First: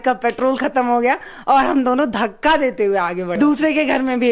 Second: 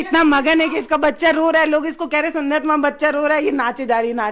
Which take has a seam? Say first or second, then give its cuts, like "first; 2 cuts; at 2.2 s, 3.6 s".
first; 1 cut; at 3.3 s